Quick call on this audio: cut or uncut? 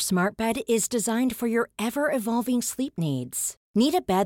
uncut